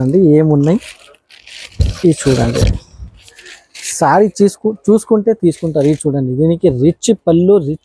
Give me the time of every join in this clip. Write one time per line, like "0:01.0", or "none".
none